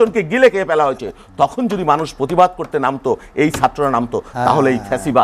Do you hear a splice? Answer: no; 0 cuts

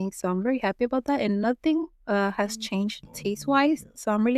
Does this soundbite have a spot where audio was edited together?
no; 0 cuts

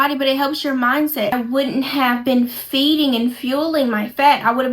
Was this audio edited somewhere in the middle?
yes; 1 cut; at 1.3 s

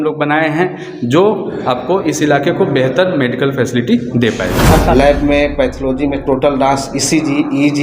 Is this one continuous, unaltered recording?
no; 1 cut; at 4.7 s

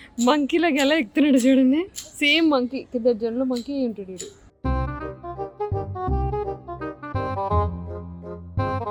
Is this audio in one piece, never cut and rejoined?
yes; 0 cuts

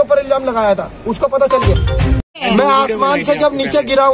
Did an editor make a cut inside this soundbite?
yes; 1 cut; at 2.1 s

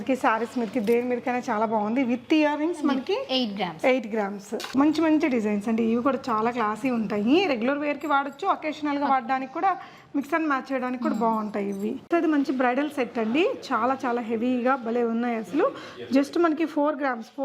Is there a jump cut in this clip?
yes; 2 cuts; at 4.7 s, 12.1 s

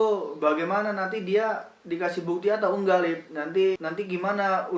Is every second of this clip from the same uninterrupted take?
no; 1 cut; at 3.8 s

